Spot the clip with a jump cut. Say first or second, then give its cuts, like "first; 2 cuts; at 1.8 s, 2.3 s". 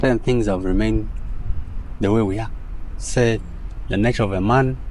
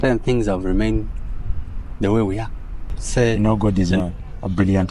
second; 1 cut; at 3.4 s